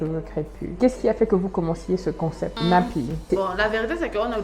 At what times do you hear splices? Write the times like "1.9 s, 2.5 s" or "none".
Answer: 0.8 s, 2.5 s, 3.2 s